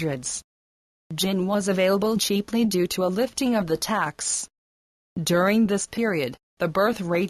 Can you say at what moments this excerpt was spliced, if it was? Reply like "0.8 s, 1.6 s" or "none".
none